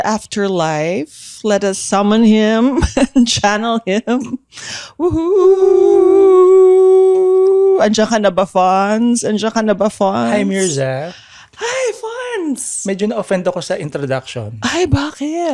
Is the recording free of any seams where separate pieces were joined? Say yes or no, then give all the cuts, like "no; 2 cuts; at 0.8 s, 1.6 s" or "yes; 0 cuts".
yes; 0 cuts